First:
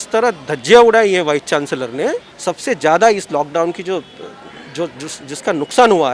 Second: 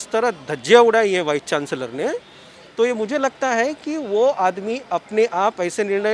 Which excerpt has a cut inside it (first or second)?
first